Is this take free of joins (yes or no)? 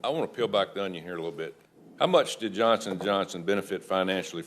no